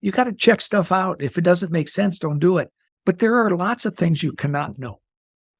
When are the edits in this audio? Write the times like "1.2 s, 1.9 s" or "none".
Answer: 2.8 s